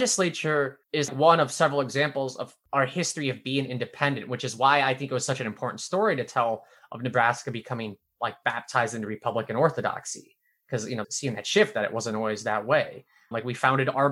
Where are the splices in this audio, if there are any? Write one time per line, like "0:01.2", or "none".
0:01.1
0:02.5